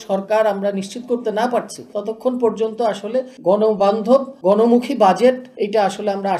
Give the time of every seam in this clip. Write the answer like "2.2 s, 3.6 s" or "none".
1.8 s, 3.3 s, 4.3 s, 5.5 s